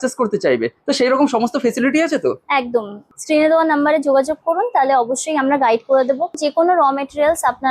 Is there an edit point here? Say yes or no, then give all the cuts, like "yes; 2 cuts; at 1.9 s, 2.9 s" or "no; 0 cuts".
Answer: yes; 2 cuts; at 3.0 s, 6.4 s